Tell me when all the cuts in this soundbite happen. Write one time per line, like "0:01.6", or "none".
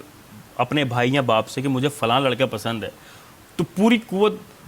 none